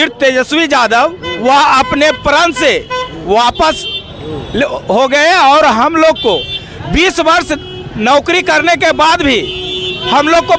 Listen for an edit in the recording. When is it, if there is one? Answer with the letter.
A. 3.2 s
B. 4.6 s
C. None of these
C